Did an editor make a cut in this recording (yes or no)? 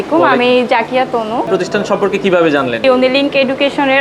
yes